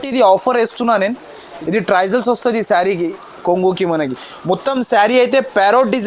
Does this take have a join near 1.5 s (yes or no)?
yes